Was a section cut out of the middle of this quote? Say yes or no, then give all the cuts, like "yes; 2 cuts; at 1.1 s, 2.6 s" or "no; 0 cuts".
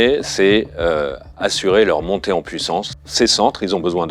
yes; 1 cut; at 3.0 s